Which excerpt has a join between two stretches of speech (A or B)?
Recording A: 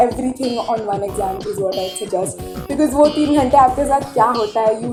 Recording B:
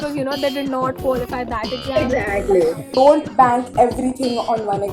B